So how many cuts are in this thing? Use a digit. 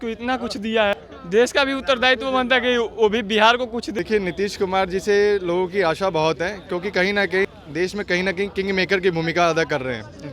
3